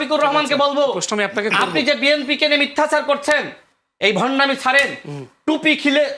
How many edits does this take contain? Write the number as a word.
zero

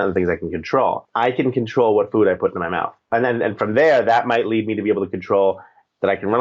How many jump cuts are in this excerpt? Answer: two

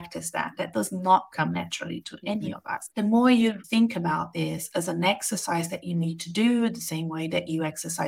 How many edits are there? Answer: two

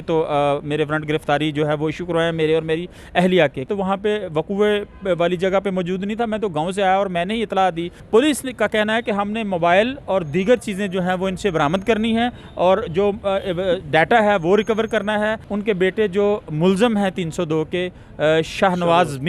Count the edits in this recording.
three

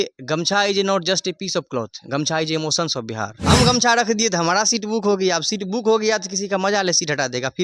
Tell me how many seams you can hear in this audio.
one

